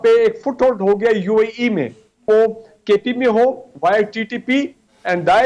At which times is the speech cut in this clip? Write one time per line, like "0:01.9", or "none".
0:02.2